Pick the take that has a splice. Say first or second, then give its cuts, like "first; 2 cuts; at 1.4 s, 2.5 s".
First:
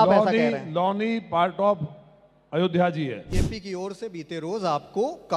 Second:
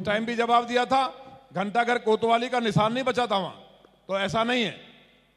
first; 1 cut; at 3.2 s